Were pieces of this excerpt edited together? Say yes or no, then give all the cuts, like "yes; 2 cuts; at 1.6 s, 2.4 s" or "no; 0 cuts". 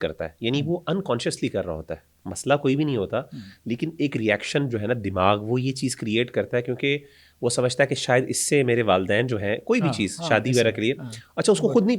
no; 0 cuts